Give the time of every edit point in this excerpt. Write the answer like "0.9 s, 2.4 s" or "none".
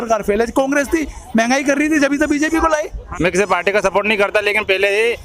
3.0 s